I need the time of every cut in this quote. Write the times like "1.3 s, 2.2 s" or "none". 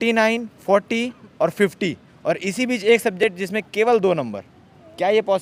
none